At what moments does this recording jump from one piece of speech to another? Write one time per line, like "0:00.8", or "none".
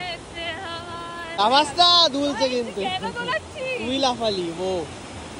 0:01.4